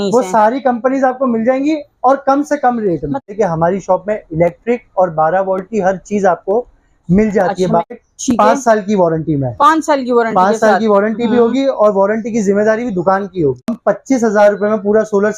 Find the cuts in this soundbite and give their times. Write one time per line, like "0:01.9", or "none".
0:03.2
0:07.9
0:13.7